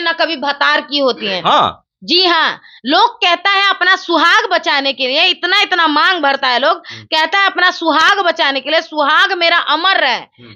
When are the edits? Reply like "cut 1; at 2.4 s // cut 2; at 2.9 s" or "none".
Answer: none

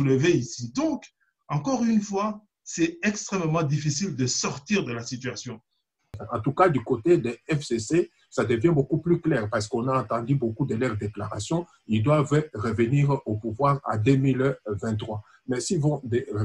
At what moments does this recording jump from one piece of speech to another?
cut 1; at 6.2 s

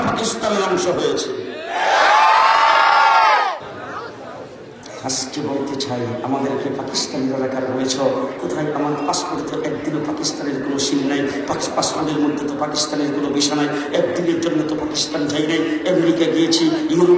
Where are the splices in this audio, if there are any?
cut 1; at 3.6 s

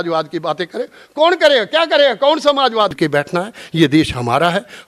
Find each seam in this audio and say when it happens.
cut 1; at 2.9 s

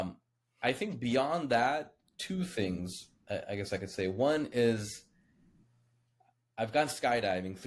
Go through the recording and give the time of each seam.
none

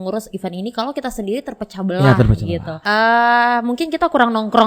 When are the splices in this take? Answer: cut 1; at 2.7 s

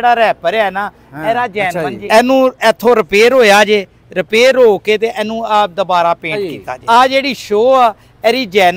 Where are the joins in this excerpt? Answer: cut 1; at 1.7 s // cut 2; at 6.3 s

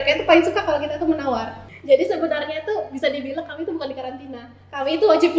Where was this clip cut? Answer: cut 1; at 1.6 s

